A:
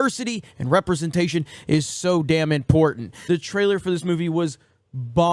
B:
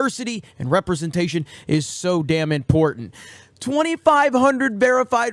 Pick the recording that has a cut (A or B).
A